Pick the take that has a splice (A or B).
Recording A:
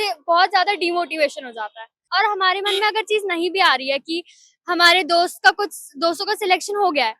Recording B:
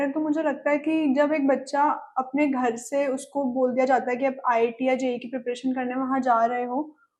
A